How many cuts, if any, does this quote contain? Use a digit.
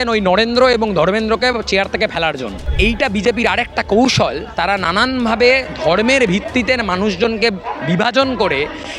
1